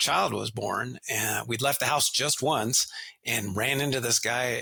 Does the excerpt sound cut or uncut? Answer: uncut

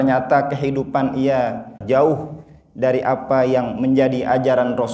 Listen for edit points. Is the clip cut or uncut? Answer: cut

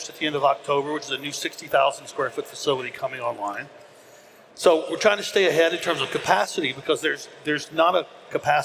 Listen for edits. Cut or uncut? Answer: uncut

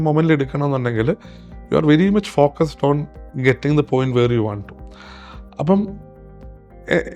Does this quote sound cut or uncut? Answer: uncut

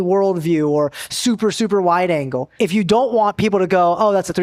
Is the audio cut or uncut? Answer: cut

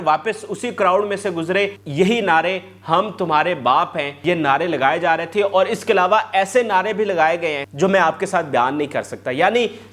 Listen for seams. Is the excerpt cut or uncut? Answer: cut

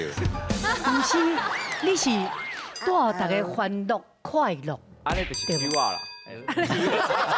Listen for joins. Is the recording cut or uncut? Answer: uncut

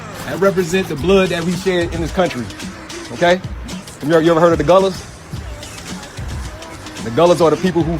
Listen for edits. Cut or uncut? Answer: cut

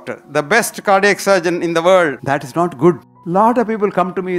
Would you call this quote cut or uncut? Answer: cut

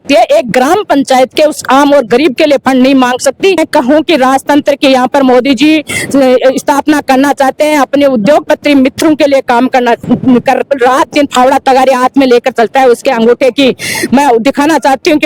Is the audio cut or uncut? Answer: cut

